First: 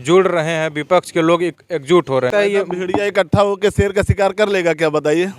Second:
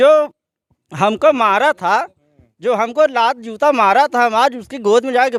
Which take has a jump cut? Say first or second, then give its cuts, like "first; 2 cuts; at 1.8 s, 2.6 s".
first; 1 cut; at 2.3 s